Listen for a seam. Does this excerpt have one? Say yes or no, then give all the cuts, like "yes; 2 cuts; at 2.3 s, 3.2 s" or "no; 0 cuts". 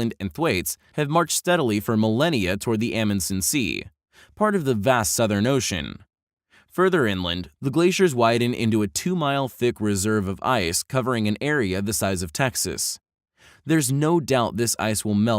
yes; 1 cut; at 4.8 s